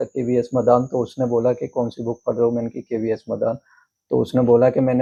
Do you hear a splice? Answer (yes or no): no